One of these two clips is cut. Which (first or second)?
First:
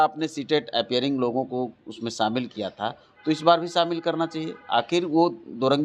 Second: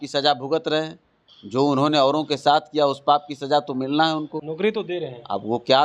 second